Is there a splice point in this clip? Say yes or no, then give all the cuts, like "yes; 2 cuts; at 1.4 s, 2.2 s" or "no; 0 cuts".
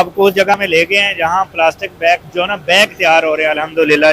yes; 1 cut; at 2.3 s